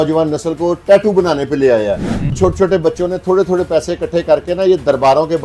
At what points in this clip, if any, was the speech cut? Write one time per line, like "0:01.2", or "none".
0:02.3

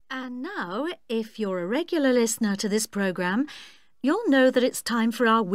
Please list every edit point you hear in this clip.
0:01.2

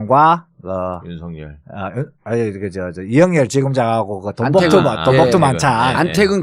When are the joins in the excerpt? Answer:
none

